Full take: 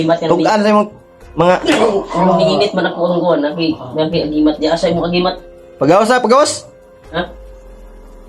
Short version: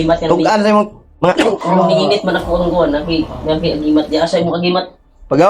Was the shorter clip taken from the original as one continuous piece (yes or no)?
no